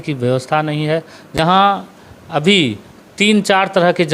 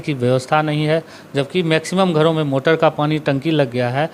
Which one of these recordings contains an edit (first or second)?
first